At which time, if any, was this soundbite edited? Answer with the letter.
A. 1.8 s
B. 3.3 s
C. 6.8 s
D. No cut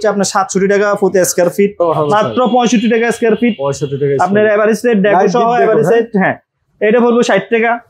A